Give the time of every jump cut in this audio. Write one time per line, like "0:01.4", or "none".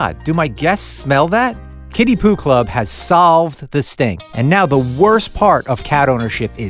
none